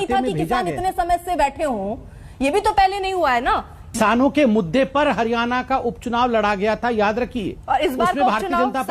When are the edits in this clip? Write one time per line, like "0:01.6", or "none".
0:04.0